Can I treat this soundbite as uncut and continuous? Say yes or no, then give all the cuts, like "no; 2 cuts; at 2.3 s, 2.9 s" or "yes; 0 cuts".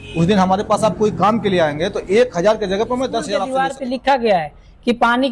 no; 1 cut; at 3.4 s